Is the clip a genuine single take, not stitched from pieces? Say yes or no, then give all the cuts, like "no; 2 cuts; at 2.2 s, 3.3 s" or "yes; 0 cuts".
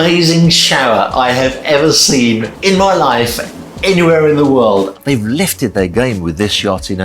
no; 2 cuts; at 2.5 s, 4.9 s